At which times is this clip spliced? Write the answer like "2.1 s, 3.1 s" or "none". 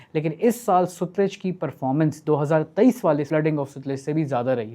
3.3 s